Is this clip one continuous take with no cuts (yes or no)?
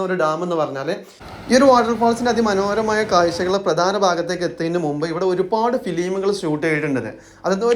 no